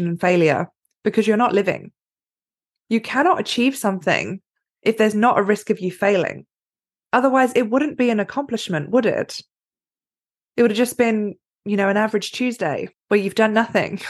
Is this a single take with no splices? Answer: no; 1 cut; at 12.9 s

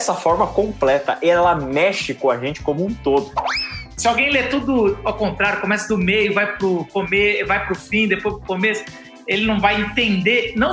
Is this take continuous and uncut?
no; 1 cut; at 3.6 s

